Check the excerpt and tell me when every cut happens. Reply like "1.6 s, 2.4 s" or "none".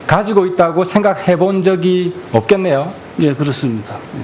1.2 s